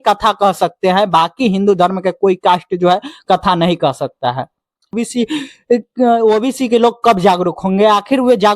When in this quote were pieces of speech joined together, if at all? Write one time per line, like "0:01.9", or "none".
0:04.9